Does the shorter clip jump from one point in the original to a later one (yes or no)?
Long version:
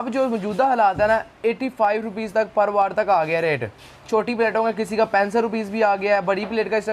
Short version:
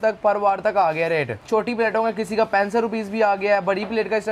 yes